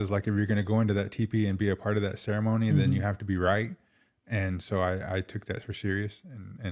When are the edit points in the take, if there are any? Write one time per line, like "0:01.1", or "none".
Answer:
none